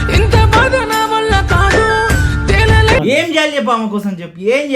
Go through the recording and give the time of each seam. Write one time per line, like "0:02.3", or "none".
0:03.0

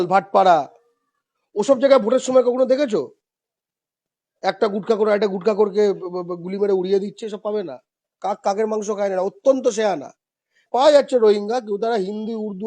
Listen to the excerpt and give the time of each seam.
0:10.6

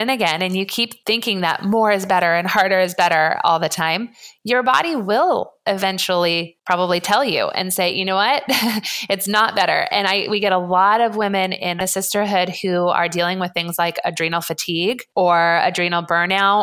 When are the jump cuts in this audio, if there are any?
0:00.9
0:06.5
0:11.8
0:15.0

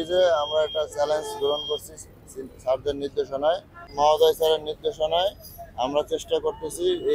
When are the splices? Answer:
0:03.9

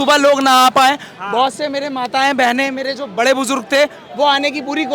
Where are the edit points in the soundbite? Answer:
none

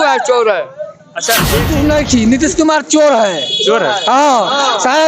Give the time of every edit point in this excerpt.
0:01.7

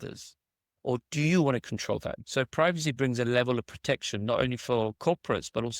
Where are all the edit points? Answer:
0:02.2

